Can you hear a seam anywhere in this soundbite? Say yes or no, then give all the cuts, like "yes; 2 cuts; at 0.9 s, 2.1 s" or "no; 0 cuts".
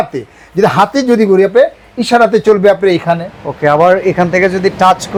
no; 0 cuts